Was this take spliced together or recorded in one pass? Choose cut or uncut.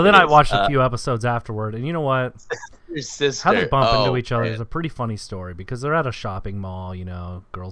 uncut